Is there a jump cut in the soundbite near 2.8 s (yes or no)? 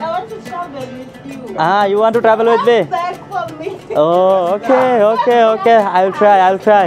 no